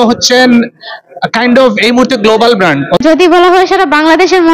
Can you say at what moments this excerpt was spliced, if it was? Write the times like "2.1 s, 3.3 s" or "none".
3.0 s